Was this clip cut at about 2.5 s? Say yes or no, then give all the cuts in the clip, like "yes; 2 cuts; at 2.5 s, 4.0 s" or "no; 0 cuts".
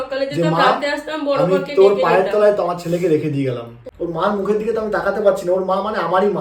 no; 1 cut; at 3.8 s